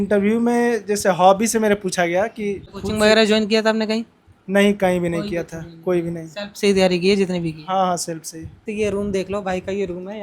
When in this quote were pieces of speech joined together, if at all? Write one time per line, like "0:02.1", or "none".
0:02.7
0:08.6